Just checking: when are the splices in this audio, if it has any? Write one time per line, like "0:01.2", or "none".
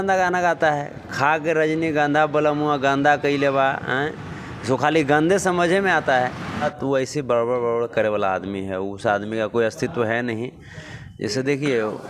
0:06.6